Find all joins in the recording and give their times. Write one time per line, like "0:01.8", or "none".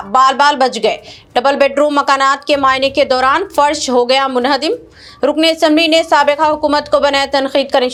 none